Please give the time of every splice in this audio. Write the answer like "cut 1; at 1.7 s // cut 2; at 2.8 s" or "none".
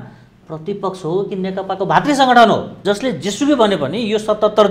cut 1; at 2.7 s

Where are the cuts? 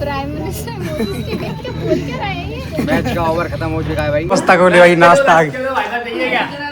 cut 1; at 4.2 s

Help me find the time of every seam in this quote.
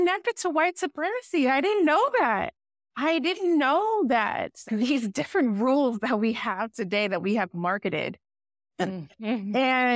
none

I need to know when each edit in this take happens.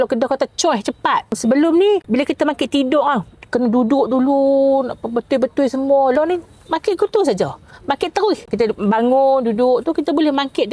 cut 1; at 1.4 s // cut 2; at 6.1 s

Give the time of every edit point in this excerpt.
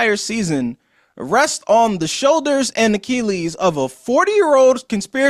none

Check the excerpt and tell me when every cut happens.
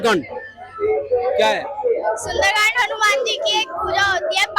none

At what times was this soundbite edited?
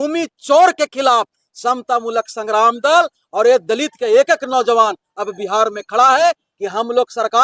none

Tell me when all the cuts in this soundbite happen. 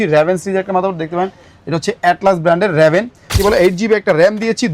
cut 1; at 3.4 s

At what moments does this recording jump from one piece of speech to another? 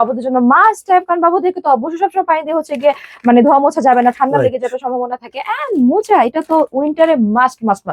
none

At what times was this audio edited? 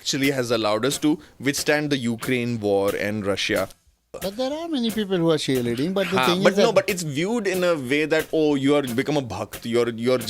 cut 1; at 4.1 s

